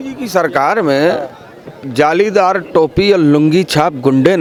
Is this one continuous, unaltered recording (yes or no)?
yes